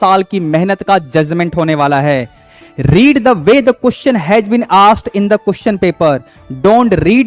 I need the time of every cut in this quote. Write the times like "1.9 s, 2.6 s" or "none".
2.4 s